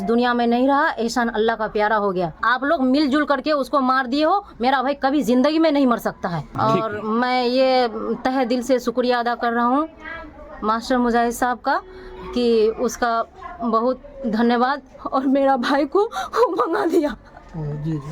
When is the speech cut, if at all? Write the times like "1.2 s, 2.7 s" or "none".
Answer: 2.4 s, 6.5 s